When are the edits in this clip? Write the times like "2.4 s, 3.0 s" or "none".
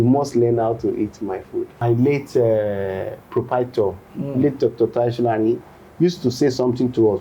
1.8 s